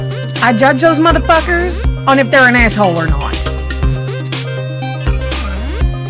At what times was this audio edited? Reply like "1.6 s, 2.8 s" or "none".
none